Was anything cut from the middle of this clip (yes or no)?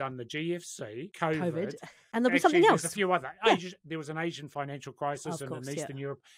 yes